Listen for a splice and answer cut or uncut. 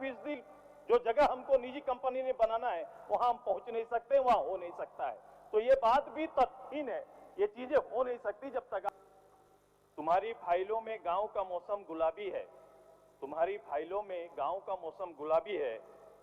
cut